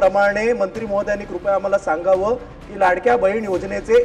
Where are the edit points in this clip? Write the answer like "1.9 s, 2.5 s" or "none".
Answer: none